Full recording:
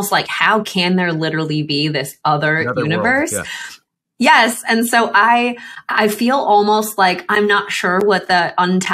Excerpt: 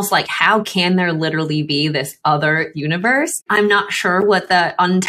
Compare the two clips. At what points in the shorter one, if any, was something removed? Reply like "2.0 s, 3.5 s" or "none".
3.4 s